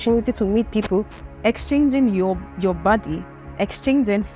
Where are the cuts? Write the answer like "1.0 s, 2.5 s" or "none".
1.2 s